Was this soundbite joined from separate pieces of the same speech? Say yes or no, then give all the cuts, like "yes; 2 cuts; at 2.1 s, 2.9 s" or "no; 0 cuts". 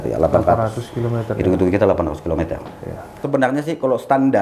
yes; 1 cut; at 3.2 s